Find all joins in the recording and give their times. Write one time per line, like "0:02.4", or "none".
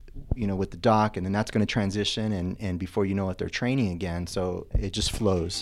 0:04.7